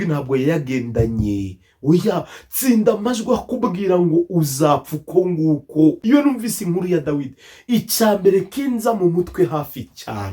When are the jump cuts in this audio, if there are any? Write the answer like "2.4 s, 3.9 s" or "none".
6.0 s